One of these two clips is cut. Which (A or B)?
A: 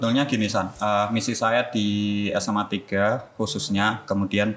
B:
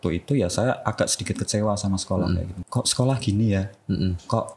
B